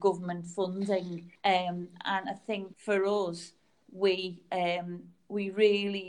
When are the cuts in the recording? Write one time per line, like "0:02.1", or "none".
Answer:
0:01.2
0:02.7